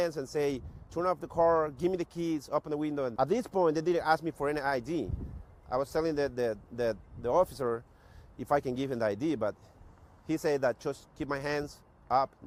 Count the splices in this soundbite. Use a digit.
0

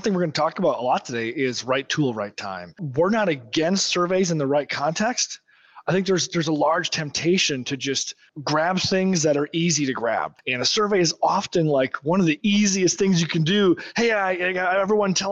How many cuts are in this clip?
3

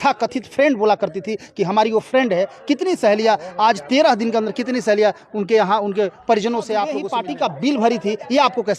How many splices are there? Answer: 1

